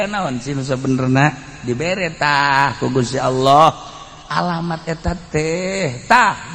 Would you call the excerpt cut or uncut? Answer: uncut